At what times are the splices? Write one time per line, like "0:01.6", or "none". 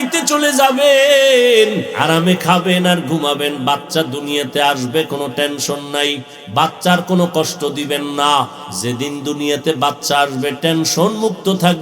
0:01.9
0:08.7